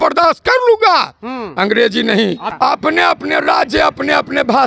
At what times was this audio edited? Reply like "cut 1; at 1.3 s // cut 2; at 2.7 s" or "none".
cut 1; at 2.4 s